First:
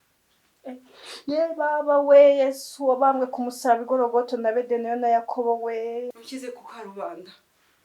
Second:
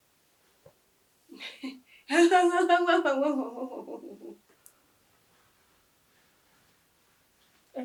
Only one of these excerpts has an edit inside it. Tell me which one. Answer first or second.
first